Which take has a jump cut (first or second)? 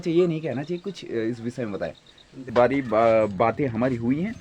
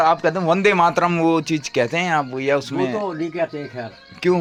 first